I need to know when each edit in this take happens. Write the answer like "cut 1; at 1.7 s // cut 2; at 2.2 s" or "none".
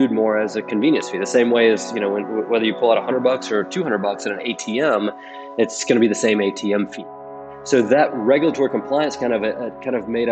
cut 1; at 7.3 s